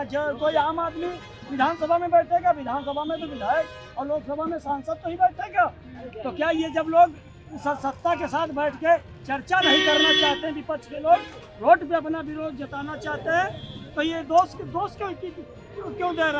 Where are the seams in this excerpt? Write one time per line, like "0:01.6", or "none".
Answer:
none